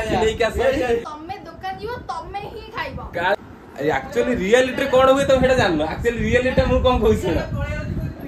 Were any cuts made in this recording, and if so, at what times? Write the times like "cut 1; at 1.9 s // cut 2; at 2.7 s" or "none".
cut 1; at 1.0 s // cut 2; at 3.4 s